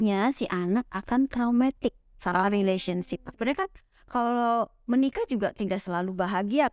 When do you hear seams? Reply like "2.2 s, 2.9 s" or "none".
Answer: 3.3 s